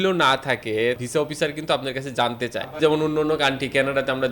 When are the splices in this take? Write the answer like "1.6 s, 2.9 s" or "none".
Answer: 1.0 s, 2.7 s